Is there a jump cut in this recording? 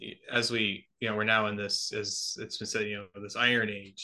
no; 0 cuts

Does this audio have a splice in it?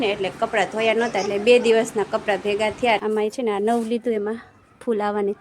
yes; 1 cut; at 3.0 s

